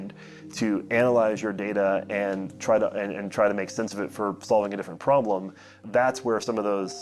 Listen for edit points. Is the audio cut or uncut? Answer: cut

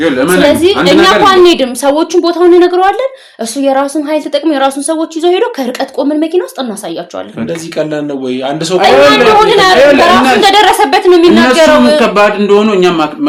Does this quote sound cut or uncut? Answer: uncut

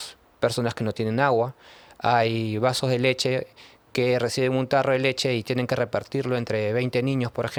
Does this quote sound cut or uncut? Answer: uncut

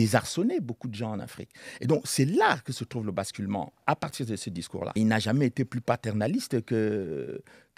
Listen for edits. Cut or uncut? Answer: cut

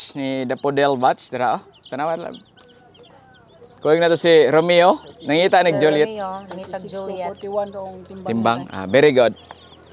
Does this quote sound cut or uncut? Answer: uncut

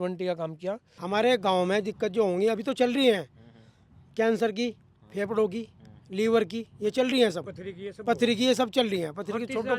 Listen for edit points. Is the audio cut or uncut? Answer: cut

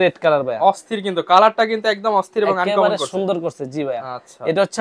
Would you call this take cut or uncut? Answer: uncut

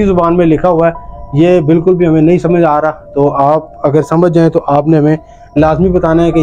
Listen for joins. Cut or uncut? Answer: uncut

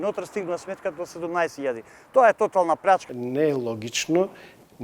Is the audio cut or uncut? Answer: cut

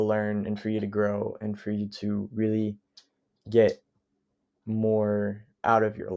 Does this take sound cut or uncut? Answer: uncut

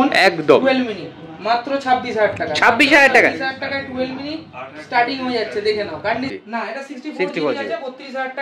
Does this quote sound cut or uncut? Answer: cut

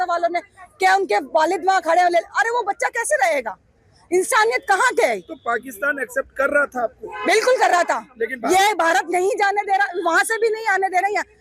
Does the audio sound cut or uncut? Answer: uncut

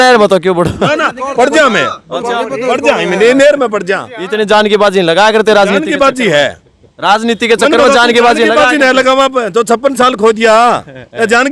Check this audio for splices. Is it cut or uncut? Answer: uncut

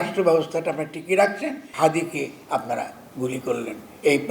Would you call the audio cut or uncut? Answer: cut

